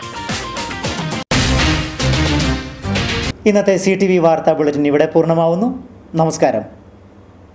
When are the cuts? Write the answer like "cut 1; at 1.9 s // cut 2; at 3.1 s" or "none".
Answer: none